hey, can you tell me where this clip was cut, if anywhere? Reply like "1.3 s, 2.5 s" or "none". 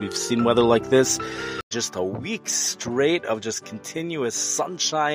1.7 s